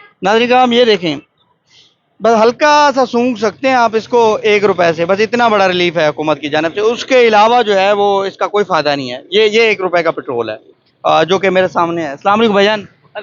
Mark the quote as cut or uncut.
uncut